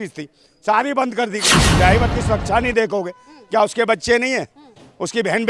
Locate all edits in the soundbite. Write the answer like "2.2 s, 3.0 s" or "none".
1.6 s